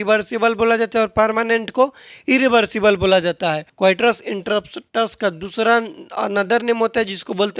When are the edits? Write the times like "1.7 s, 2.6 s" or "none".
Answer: 3.7 s